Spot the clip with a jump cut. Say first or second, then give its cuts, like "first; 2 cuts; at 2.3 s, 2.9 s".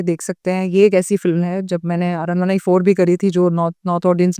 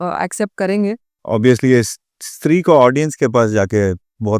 second; 1 cut; at 1.1 s